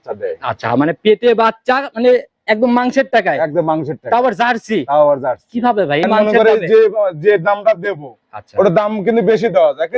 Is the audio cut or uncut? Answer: cut